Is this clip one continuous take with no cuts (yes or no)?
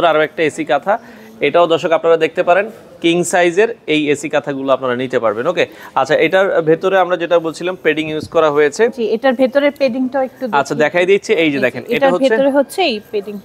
yes